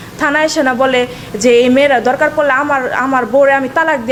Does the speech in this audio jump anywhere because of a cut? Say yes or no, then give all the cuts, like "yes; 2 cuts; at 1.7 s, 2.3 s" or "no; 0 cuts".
no; 0 cuts